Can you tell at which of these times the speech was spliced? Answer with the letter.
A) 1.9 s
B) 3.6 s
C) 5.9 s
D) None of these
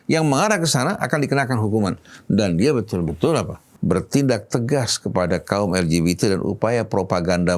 B